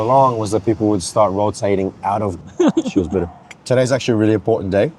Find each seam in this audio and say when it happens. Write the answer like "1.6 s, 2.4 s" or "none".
2.4 s, 3.6 s